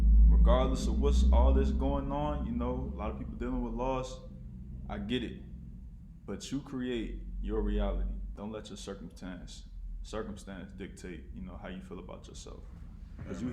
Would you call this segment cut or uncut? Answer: cut